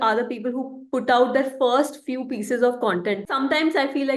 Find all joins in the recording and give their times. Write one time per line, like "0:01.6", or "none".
0:03.2